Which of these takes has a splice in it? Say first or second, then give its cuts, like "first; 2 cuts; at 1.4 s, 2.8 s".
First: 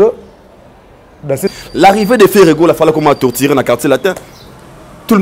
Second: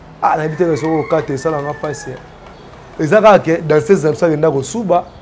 first; 1 cut; at 1.5 s